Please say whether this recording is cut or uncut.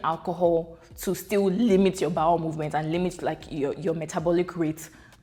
uncut